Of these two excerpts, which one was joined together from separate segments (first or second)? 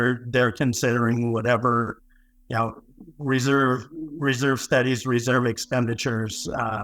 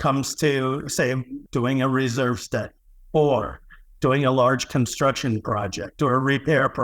second